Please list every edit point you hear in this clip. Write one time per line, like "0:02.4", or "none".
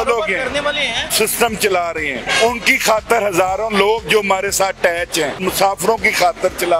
0:01.1
0:02.2
0:05.4